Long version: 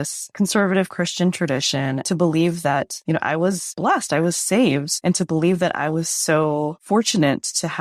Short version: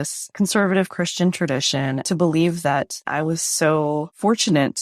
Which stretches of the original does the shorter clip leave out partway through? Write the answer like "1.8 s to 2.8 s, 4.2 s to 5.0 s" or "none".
3.0 s to 5.7 s